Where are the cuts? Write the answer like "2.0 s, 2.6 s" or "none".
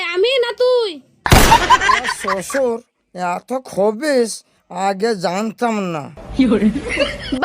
2.2 s